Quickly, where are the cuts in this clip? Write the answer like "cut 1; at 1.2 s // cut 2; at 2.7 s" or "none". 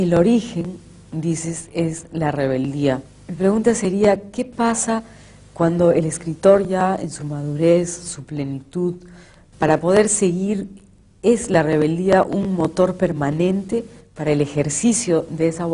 cut 1; at 4.3 s